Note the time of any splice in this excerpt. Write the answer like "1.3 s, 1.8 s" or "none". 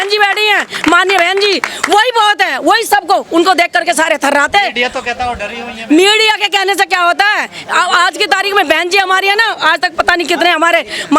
none

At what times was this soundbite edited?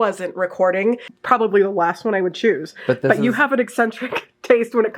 1.1 s

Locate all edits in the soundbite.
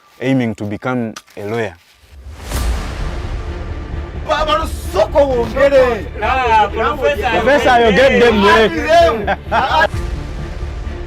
1.0 s, 9.5 s

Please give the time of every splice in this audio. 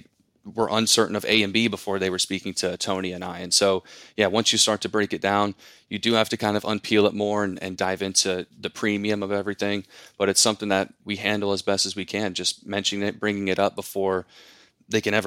7.7 s, 11.0 s

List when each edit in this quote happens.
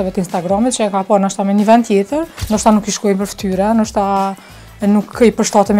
2.3 s

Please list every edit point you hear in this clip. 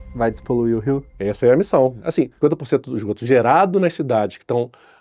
1.1 s, 2.1 s

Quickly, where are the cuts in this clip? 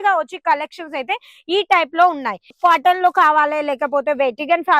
2.5 s

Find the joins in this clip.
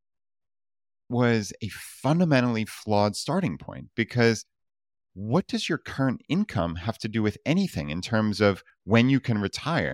1.1 s

